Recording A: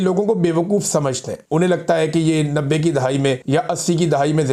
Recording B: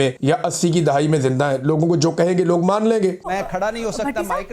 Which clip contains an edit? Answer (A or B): B